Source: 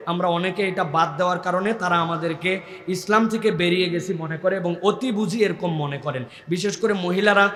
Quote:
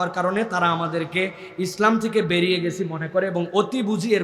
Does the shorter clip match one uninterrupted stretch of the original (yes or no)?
yes